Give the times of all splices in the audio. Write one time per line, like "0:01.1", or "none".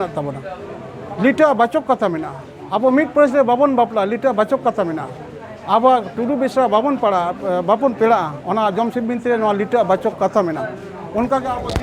none